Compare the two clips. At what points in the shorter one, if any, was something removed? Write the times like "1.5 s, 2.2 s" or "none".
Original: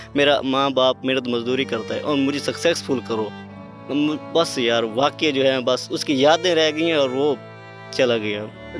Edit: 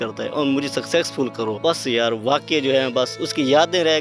1.6 s